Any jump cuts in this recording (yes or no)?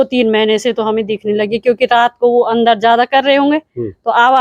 no